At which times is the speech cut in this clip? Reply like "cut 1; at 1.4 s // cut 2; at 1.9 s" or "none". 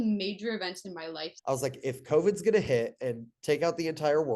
cut 1; at 1.3 s